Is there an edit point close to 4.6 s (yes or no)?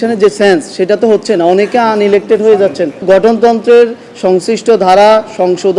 no